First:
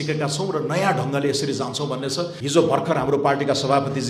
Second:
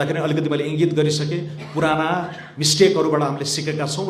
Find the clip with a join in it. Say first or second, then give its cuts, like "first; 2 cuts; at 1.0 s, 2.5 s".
first; 1 cut; at 2.4 s